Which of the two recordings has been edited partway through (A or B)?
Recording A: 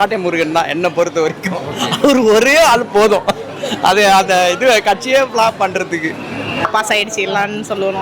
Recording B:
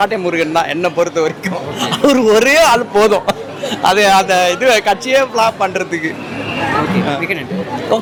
A